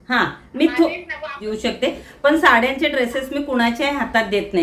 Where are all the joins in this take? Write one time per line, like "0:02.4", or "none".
0:01.4